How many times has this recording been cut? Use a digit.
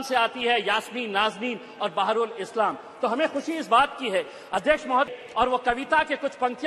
1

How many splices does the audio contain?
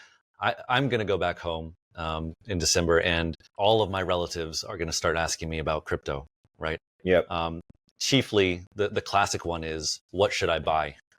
1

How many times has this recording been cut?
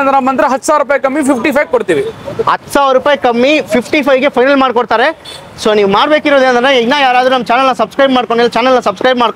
0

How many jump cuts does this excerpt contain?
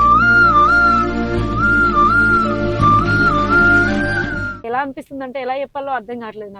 1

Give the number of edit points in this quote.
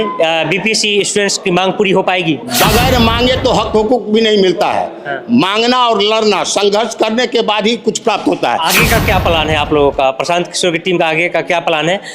2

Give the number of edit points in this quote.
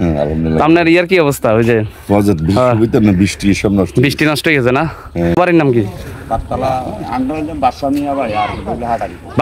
1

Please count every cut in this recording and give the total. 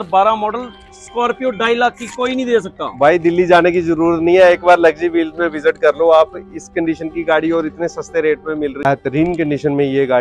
1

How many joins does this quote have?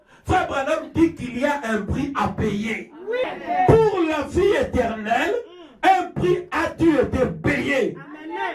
1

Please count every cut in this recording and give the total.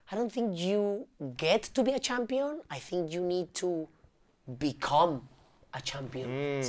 0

